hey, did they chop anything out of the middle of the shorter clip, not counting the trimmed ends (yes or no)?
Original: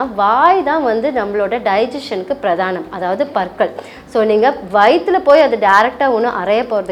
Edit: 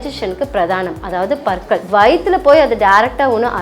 yes